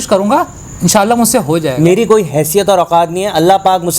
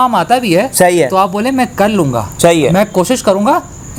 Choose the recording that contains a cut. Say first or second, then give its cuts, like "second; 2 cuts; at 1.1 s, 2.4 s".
first; 1 cut; at 1.9 s